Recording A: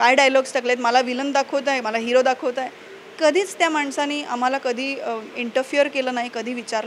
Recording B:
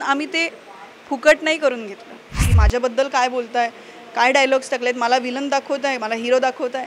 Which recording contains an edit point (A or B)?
B